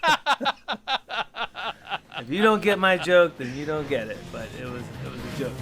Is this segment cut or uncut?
uncut